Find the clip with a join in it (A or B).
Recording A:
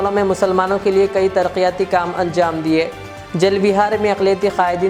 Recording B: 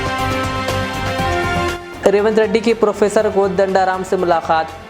B